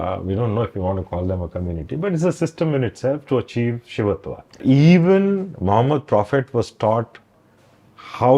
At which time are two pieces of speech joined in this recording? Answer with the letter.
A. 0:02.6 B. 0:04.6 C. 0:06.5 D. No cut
B